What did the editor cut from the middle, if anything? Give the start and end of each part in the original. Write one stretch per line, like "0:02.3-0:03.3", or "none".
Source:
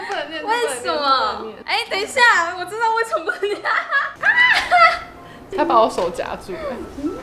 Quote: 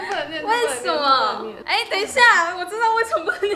none